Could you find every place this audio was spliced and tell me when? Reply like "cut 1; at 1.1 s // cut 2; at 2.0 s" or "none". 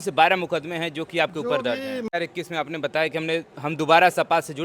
cut 1; at 2.1 s